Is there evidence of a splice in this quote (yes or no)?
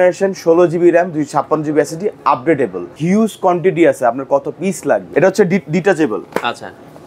yes